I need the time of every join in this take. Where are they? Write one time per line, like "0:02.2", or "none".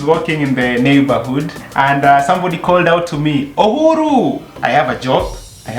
0:01.6
0:04.5